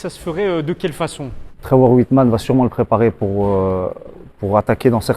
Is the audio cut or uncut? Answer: cut